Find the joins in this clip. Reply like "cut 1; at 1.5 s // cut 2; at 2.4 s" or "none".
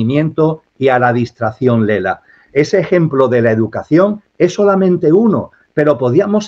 none